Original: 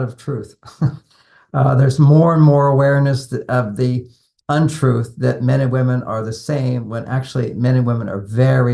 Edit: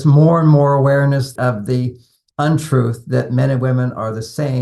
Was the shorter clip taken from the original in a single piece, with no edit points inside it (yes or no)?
no